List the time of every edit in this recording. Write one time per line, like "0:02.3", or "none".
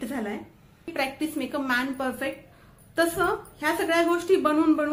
0:00.9